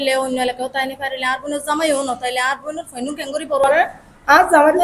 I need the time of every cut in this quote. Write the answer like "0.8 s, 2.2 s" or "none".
3.6 s